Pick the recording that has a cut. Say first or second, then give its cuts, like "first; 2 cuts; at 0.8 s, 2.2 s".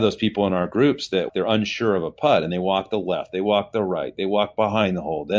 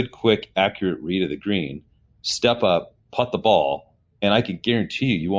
first; 1 cut; at 1.3 s